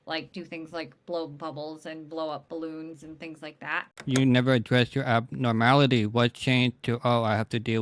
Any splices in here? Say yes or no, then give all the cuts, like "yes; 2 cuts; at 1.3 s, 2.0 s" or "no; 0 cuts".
yes; 1 cut; at 3.9 s